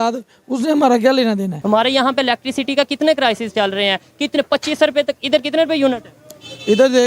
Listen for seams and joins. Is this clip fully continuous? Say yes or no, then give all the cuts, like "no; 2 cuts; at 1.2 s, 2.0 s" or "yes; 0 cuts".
no; 1 cut; at 1.6 s